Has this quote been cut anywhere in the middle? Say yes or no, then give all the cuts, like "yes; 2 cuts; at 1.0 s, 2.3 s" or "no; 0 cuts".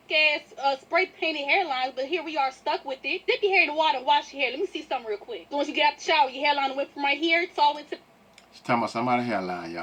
no; 0 cuts